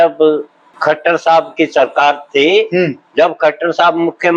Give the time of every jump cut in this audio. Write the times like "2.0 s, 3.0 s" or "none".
none

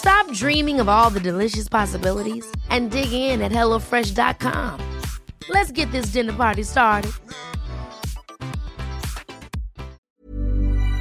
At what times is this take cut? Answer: 10.1 s

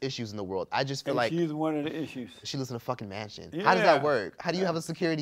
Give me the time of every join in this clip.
2.4 s

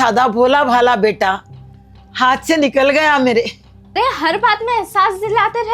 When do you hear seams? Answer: 3.9 s

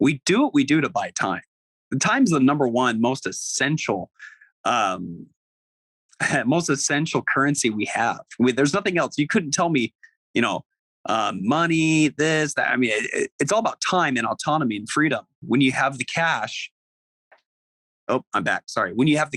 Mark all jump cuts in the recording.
none

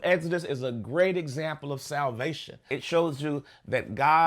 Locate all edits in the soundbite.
2.7 s

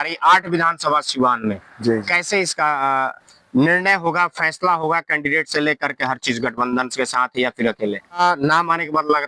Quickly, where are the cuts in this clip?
8.2 s

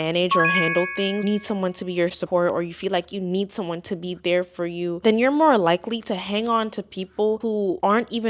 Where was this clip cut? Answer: 1.2 s

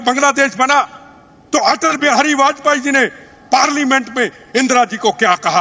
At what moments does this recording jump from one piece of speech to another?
none

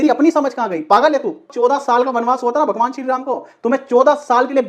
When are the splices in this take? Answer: 1.5 s

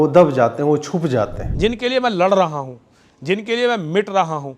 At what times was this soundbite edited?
1.4 s

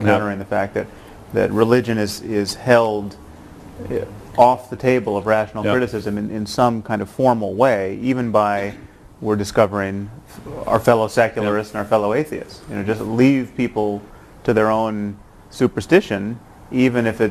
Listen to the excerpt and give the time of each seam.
none

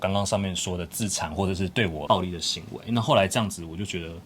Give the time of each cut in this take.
2.0 s

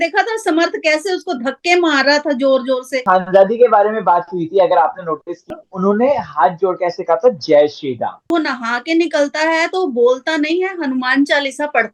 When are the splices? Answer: 3.0 s, 5.4 s, 8.3 s

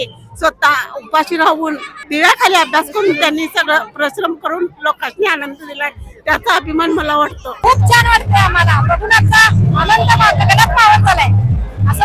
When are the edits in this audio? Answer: 2.0 s, 7.5 s

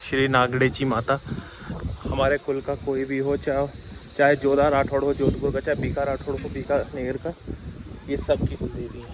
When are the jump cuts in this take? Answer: none

